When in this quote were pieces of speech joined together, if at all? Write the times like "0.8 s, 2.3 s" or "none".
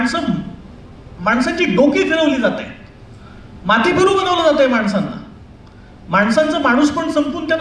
none